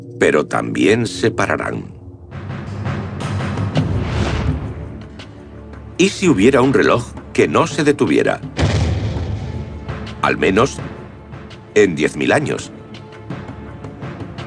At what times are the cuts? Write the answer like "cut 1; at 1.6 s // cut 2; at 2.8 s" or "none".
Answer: none